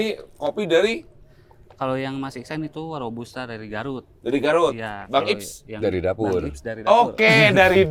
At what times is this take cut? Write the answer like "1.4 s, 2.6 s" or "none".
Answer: none

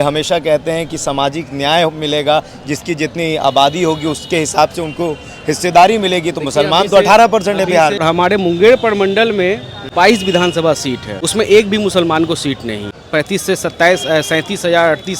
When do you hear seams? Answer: 8.0 s, 9.8 s, 11.1 s, 13.0 s

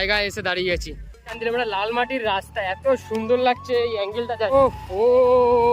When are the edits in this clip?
1.3 s, 4.5 s

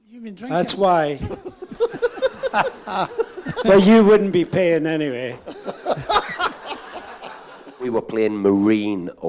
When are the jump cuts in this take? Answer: 7.9 s

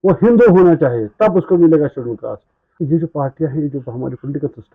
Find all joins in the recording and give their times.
2.6 s

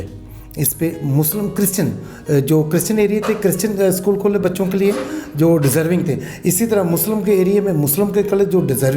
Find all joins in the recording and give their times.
none

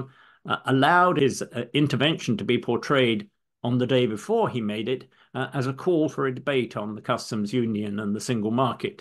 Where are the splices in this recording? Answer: 1.2 s

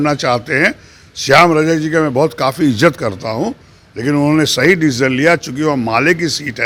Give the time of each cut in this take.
none

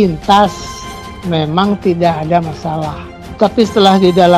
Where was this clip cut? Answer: none

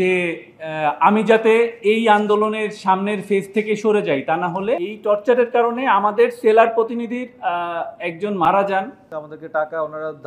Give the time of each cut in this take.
4.8 s, 9.0 s

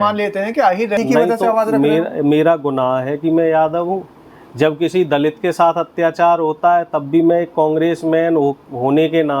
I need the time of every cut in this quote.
1.0 s

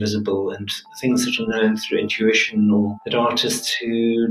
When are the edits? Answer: 3.0 s

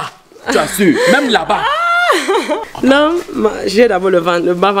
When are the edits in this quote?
2.6 s

